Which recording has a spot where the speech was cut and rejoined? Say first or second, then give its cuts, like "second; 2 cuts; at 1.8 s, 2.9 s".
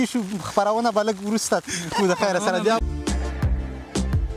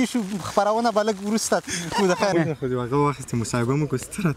second; 1 cut; at 2.3 s